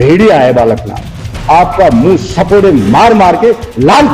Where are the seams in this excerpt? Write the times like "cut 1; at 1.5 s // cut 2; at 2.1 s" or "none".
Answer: cut 1; at 1.3 s